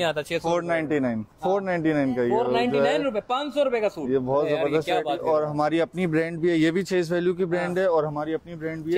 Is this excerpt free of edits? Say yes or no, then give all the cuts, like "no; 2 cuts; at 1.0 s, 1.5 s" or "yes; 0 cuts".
yes; 0 cuts